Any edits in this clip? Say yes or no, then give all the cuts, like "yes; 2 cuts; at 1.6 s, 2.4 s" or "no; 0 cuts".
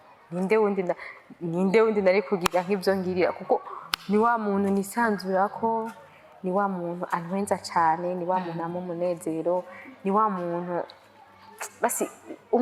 no; 0 cuts